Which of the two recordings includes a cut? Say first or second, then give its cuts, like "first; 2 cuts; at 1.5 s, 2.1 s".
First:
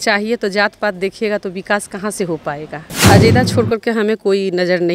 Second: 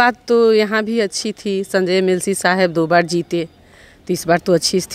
first; 1 cut; at 3.0 s